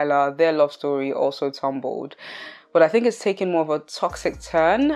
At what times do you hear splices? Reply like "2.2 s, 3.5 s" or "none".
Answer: none